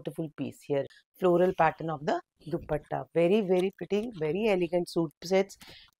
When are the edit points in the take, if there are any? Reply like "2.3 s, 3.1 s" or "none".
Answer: 0.9 s